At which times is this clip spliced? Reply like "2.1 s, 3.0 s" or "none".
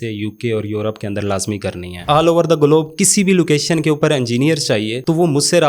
2.0 s